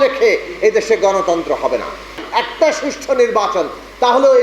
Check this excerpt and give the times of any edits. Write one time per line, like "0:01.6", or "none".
0:02.2

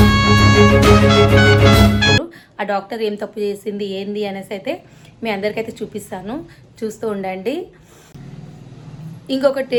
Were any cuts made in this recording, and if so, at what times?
none

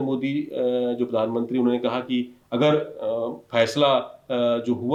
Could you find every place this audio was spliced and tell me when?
none

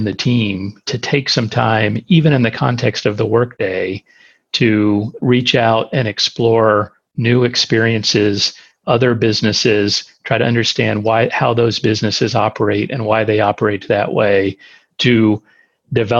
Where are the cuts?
0:03.5

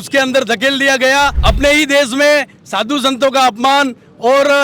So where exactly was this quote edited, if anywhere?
0:01.4

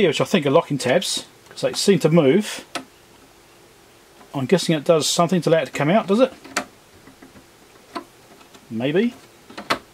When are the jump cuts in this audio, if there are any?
none

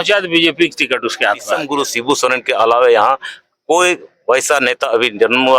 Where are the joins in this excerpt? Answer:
0:01.7

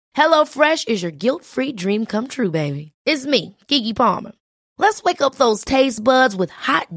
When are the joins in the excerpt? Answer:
none

